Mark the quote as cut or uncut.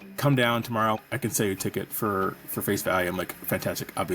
cut